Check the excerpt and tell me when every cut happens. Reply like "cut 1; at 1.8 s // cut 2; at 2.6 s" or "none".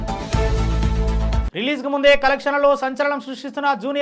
cut 1; at 1.4 s